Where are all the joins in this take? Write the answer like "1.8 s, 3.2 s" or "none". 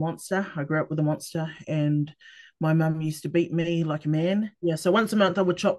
4.5 s